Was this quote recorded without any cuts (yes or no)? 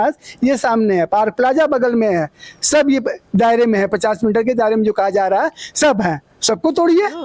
yes